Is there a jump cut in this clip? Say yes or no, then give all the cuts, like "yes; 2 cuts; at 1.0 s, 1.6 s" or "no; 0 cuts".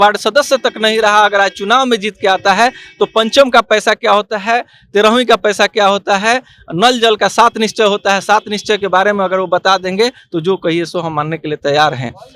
no; 0 cuts